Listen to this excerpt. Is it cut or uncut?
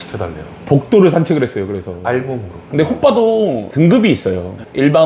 cut